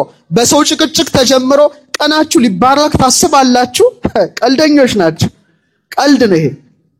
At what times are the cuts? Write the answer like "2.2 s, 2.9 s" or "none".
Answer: none